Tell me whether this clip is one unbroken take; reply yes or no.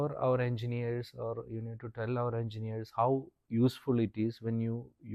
yes